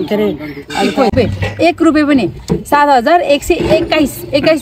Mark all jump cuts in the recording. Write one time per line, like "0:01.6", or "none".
0:01.1